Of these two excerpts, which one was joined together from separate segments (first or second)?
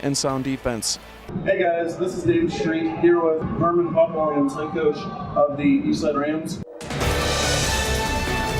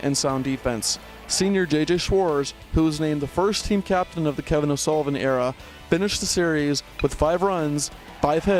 first